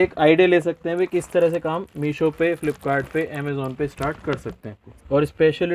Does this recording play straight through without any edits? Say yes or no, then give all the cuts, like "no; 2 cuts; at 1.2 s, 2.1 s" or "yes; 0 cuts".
no; 1 cut; at 4.8 s